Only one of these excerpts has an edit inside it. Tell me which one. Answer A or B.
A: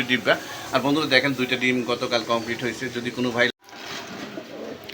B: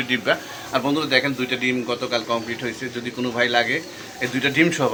A